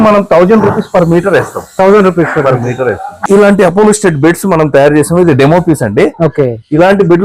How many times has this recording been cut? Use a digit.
1